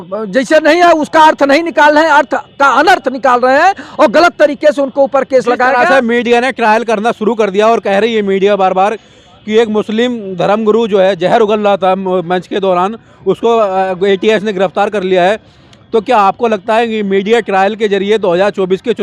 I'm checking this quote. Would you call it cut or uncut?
uncut